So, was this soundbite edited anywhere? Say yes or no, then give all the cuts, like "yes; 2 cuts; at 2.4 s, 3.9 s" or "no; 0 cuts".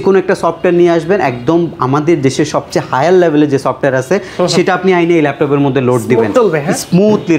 no; 0 cuts